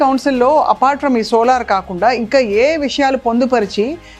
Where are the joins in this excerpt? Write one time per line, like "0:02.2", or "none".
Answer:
none